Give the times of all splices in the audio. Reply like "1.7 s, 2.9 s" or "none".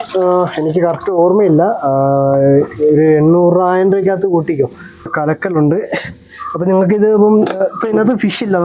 5.1 s